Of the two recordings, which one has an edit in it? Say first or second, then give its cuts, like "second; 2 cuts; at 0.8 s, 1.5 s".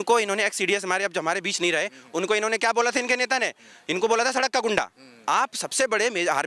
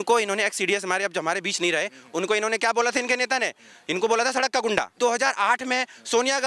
second; 1 cut; at 5.0 s